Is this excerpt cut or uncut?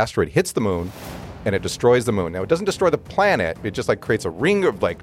uncut